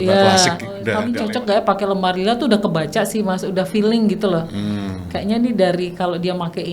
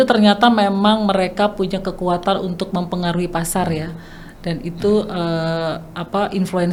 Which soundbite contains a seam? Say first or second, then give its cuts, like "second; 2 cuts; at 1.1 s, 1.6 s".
first; 1 cut; at 0.9 s